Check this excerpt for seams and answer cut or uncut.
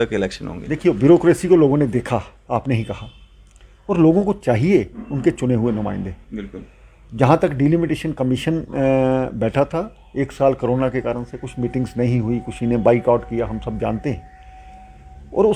uncut